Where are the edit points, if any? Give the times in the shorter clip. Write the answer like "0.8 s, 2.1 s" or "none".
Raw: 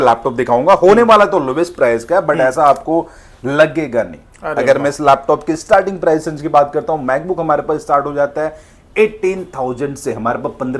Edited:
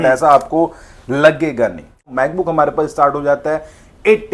2.1 s